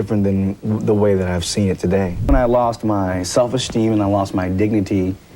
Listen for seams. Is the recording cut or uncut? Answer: cut